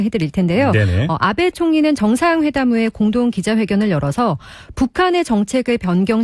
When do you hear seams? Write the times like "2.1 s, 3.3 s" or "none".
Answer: none